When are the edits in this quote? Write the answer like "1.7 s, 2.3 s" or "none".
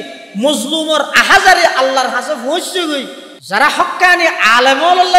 3.2 s